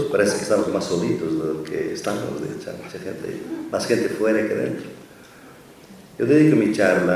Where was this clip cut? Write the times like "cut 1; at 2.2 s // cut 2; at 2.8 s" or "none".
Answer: none